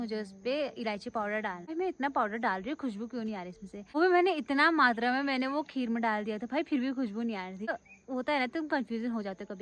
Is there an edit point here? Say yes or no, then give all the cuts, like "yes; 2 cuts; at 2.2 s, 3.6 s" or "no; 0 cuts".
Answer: yes; 3 cuts; at 1.7 s, 3.9 s, 7.7 s